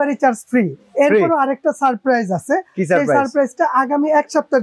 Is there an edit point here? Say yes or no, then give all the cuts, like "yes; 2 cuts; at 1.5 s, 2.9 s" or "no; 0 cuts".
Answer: no; 0 cuts